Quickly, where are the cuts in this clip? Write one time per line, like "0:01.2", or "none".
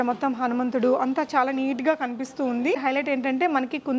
0:02.8